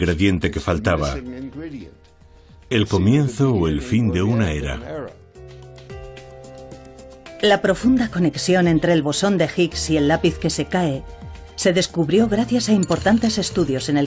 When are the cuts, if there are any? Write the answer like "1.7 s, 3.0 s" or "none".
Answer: 8.4 s